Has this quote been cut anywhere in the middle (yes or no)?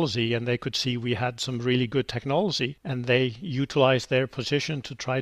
no